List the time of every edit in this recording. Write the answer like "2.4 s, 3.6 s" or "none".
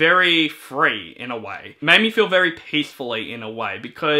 1.6 s